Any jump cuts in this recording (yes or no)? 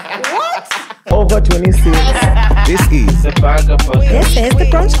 yes